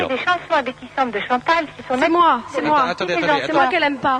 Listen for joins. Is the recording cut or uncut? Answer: uncut